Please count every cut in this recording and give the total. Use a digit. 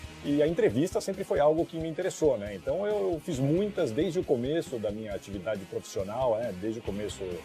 1